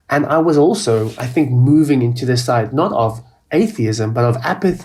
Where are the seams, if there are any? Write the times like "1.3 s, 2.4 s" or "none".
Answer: none